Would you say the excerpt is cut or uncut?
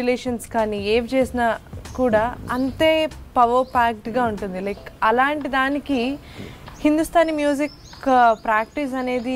uncut